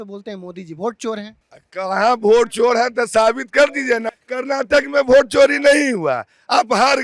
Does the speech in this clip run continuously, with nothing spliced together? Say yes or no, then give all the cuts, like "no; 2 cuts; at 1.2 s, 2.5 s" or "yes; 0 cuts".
no; 1 cut; at 4.1 s